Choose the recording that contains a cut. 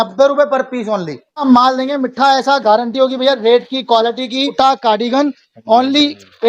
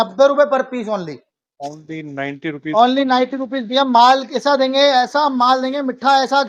first; 2 cuts; at 1.4 s, 4.5 s

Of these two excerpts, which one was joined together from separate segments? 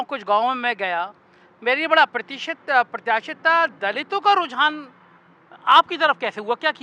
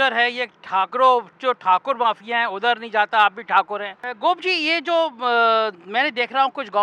second; 1 cut; at 4.0 s

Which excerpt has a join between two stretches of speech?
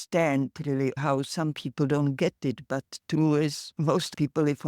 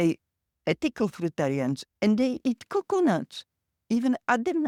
first; 1 cut; at 1.0 s

